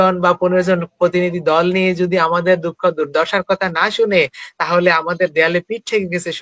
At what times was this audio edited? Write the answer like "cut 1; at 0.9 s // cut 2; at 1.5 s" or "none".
none